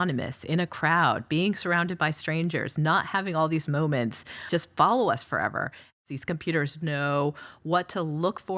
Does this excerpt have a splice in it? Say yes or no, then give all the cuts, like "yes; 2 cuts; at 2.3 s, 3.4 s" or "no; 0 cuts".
yes; 2 cuts; at 4.4 s, 5.9 s